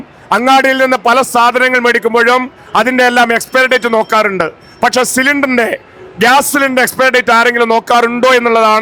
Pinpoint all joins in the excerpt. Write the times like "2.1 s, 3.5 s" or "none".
none